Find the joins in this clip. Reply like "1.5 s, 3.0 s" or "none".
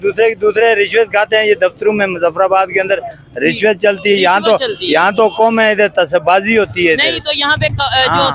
none